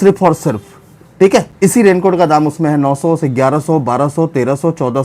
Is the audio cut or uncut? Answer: uncut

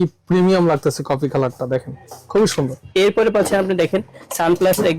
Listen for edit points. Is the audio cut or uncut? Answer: cut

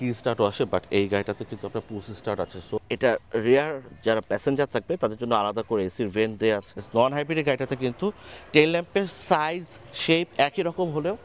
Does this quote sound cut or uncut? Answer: cut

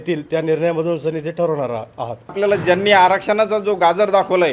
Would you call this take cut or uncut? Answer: cut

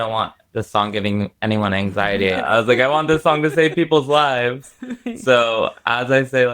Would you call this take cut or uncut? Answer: cut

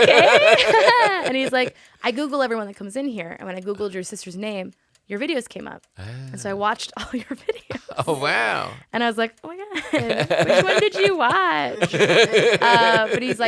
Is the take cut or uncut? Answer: uncut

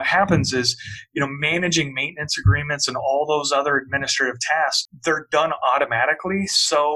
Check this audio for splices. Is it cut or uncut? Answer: cut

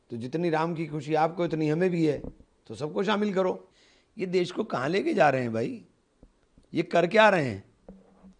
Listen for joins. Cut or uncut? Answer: cut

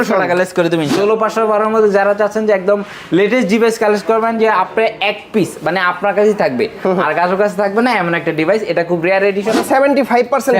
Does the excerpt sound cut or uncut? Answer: cut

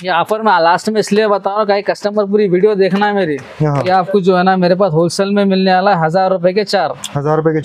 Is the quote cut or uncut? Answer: cut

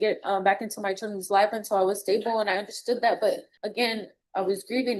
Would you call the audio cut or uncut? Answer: cut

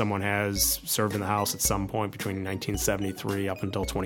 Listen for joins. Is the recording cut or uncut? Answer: uncut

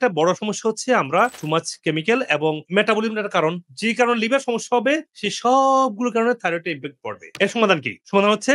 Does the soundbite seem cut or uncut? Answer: cut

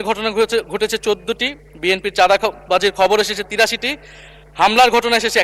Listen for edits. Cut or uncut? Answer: uncut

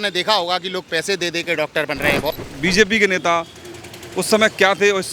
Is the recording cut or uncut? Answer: cut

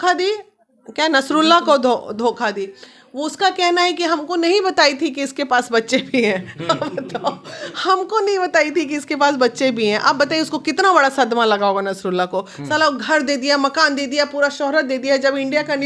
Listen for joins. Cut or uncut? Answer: uncut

